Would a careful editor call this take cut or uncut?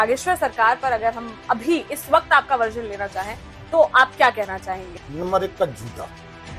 cut